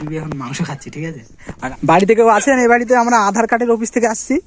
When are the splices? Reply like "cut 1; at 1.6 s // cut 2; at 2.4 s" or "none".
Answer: cut 1; at 1.8 s